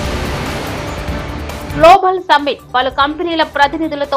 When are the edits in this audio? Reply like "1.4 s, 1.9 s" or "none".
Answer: 1.7 s